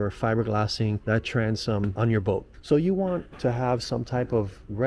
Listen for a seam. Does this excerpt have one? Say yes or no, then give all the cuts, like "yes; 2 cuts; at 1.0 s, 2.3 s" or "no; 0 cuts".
yes; 2 cuts; at 1.0 s, 2.5 s